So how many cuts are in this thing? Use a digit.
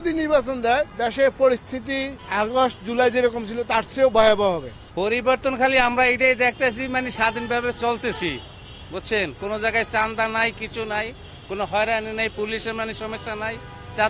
3